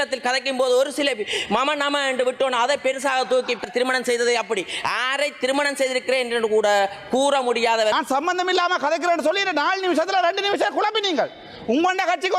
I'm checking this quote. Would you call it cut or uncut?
cut